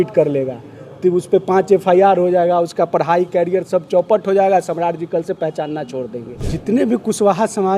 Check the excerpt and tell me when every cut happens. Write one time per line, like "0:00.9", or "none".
0:06.5